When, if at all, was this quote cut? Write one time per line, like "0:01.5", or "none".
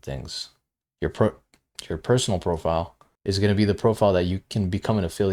0:03.0